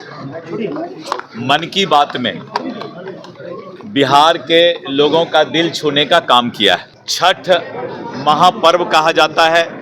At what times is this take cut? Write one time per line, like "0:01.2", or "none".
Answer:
0:07.0